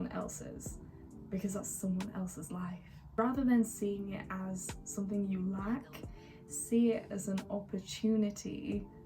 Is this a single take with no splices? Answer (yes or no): no